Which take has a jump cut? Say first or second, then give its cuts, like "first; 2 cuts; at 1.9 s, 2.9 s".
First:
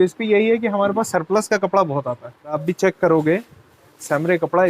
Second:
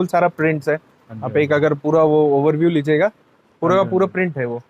first; 1 cut; at 2.6 s